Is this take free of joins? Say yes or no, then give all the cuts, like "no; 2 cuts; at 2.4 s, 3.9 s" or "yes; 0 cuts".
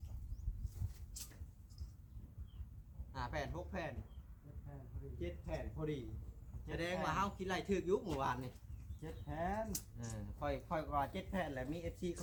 yes; 0 cuts